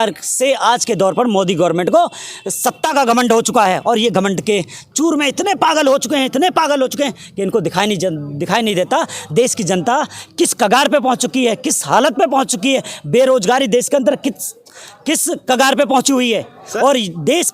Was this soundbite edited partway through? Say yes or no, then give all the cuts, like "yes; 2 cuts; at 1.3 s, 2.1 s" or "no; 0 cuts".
no; 0 cuts